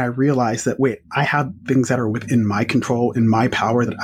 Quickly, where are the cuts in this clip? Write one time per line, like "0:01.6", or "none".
none

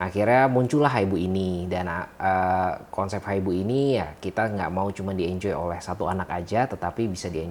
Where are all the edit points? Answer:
none

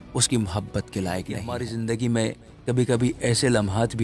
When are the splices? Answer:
0:01.6

